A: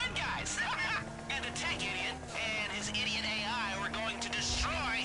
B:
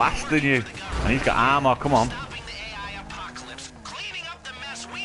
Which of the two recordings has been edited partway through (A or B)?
A